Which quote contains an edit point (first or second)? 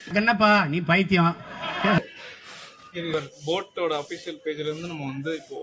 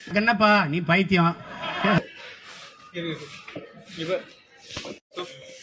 first